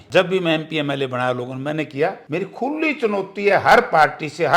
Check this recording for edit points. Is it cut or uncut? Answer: cut